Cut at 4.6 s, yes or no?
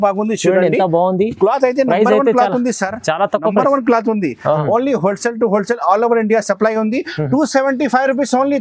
yes